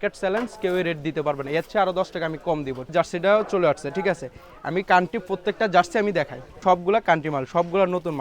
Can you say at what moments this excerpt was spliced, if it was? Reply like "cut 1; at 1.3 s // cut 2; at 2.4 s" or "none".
cut 1; at 2.9 s // cut 2; at 6.6 s